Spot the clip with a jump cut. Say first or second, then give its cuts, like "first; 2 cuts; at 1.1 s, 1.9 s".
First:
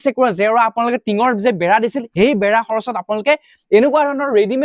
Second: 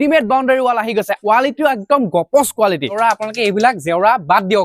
second; 2 cuts; at 1.2 s, 3.0 s